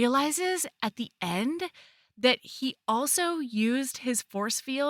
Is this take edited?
no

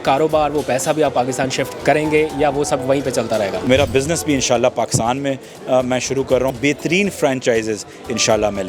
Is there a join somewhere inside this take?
yes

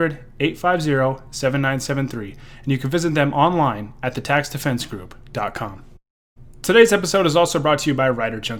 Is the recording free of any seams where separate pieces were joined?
yes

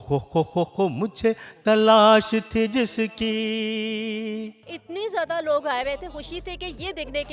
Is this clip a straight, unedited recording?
no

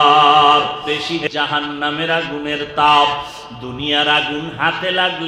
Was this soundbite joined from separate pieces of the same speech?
yes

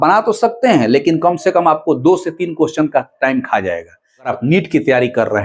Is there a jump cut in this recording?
yes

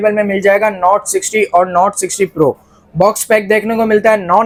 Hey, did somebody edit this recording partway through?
no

